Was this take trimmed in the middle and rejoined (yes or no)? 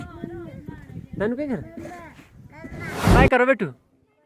yes